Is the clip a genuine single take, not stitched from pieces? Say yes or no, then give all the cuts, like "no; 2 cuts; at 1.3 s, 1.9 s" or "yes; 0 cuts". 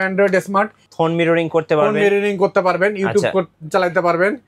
yes; 0 cuts